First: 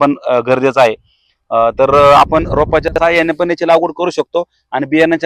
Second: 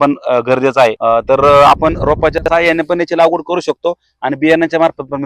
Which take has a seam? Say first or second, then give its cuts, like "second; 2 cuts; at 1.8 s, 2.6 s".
second; 1 cut; at 1.0 s